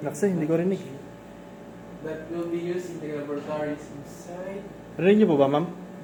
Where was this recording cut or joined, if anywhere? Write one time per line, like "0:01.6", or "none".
none